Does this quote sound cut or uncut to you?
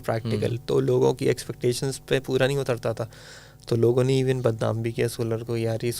uncut